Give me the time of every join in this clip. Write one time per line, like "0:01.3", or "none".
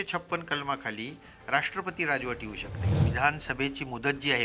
0:03.0